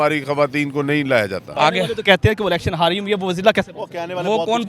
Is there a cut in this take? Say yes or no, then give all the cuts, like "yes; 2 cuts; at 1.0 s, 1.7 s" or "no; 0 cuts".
yes; 1 cut; at 1.5 s